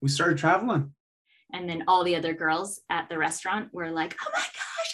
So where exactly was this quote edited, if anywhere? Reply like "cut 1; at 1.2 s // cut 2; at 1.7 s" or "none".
cut 1; at 1.0 s

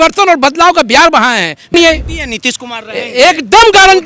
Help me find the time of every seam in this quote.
cut 1; at 1.7 s

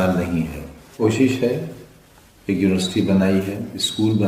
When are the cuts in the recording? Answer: cut 1; at 1.0 s

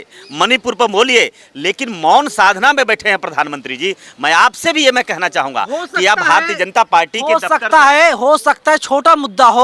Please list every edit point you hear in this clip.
none

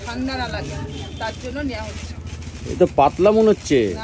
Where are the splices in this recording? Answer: none

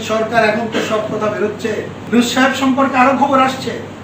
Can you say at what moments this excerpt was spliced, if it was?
cut 1; at 1.9 s

